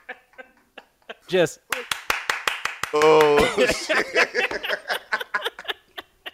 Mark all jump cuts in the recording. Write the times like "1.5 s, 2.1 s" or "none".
1.1 s